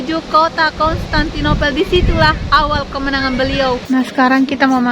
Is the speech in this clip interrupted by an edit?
yes; 1 cut; at 3.8 s

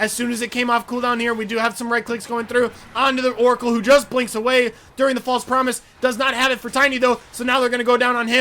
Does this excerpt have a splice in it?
no; 0 cuts

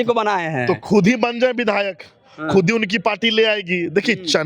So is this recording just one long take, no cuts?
yes; 0 cuts

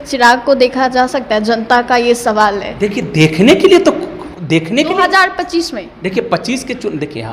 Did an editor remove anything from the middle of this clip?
no; 0 cuts

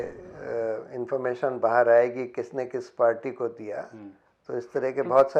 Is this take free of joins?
yes; 0 cuts

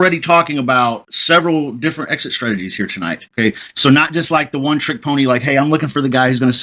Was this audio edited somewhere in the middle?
yes; 1 cut; at 3.3 s

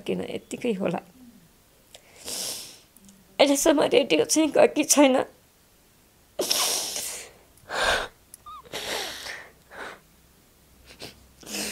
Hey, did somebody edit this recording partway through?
no; 0 cuts

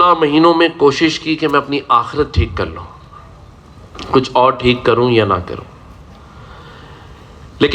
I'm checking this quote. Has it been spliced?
no; 0 cuts

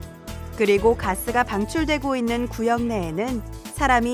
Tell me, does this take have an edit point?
no; 0 cuts

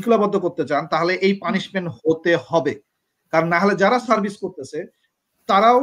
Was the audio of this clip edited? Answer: no; 0 cuts

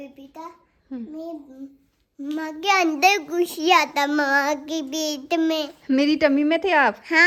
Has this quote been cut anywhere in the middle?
no; 0 cuts

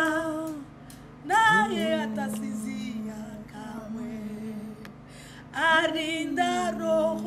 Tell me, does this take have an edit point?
no; 0 cuts

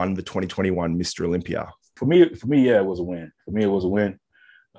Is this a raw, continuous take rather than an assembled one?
no; 1 cut; at 2.0 s

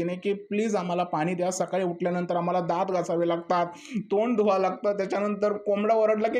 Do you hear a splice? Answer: no; 0 cuts

